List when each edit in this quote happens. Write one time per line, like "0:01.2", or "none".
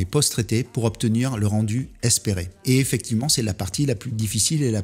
0:02.5